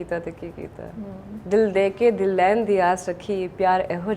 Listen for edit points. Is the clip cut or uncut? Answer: cut